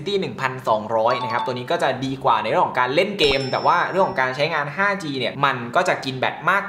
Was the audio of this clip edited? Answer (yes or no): yes